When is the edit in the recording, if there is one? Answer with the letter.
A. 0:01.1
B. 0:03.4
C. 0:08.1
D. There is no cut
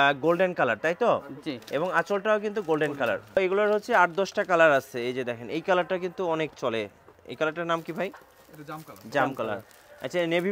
B